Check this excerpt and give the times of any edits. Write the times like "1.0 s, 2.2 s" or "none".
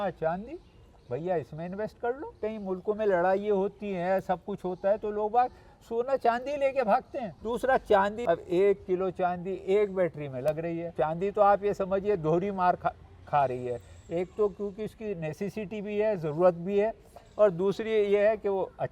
2.4 s, 7.3 s, 8.2 s, 10.9 s